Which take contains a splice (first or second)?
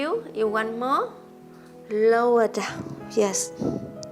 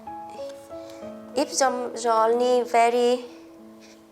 second